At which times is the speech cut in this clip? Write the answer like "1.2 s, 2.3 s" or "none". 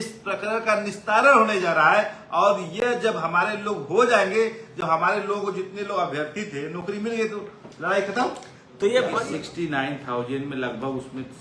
9.2 s